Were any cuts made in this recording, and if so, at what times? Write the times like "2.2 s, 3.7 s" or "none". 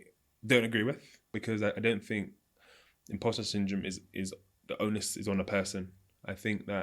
1.3 s